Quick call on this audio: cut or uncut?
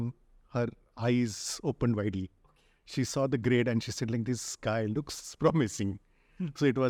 uncut